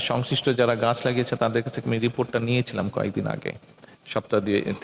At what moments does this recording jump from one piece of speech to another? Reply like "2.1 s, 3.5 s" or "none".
none